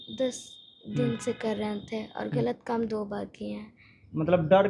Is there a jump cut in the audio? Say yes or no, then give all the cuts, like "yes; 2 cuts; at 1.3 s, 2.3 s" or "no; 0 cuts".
no; 0 cuts